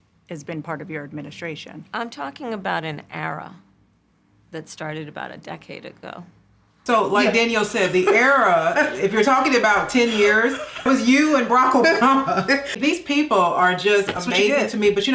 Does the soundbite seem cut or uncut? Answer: cut